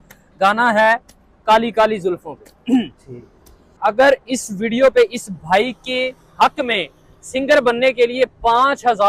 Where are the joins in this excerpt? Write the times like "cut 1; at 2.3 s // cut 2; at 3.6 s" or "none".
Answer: cut 1; at 3.8 s